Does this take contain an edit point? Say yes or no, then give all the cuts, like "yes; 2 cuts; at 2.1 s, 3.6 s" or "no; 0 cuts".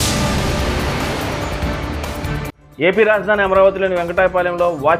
no; 0 cuts